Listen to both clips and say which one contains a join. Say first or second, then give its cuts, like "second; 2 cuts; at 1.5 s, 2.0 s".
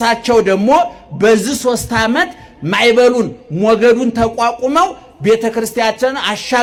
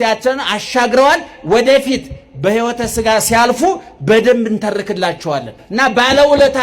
second; 1 cut; at 5.6 s